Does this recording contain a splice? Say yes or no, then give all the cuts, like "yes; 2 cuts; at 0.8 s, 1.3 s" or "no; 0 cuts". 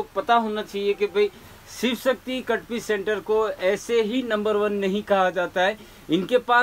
no; 0 cuts